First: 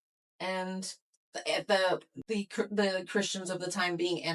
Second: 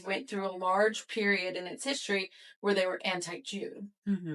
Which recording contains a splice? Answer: first; 1 cut; at 2.1 s

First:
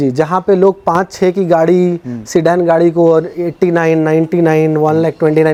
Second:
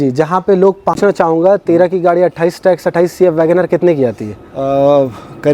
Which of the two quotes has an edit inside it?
second; 1 cut; at 1.0 s

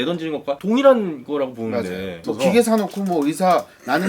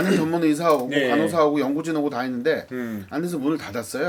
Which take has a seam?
first; 1 cut; at 2.2 s

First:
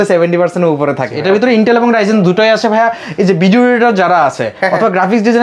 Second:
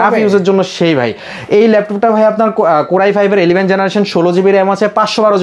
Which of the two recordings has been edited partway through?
first; 1 cut; at 1.1 s

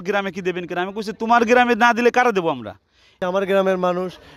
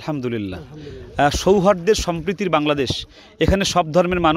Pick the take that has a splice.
first; 1 cut; at 3.2 s

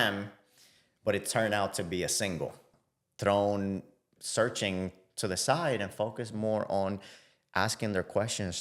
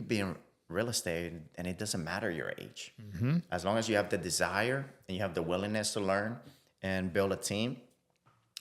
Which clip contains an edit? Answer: first; 1 cut; at 2.7 s

